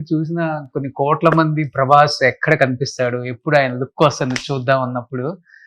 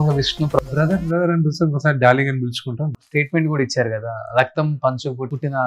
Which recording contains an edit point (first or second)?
second